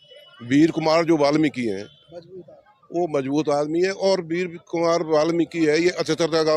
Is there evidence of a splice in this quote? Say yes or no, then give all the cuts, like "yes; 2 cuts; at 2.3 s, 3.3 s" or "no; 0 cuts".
no; 0 cuts